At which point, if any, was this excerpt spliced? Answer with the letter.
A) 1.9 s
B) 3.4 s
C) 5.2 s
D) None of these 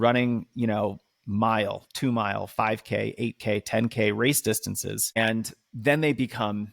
C